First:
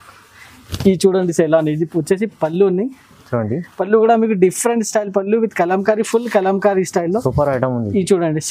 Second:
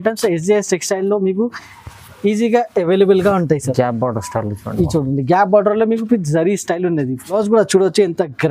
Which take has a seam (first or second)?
second